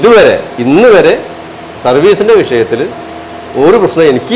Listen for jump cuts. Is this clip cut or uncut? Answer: uncut